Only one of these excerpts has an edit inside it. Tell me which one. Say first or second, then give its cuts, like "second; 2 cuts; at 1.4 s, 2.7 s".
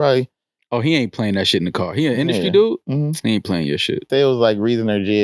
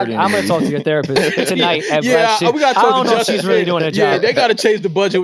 first; 1 cut; at 4.1 s